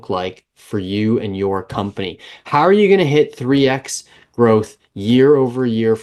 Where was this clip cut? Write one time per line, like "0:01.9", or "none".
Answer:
none